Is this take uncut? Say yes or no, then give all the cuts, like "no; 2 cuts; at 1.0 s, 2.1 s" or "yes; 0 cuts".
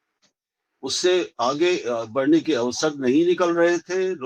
yes; 0 cuts